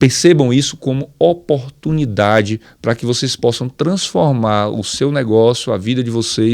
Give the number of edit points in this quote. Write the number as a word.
zero